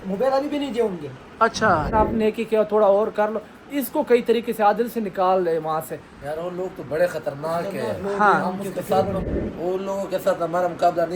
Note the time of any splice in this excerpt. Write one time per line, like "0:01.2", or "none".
0:01.9
0:09.3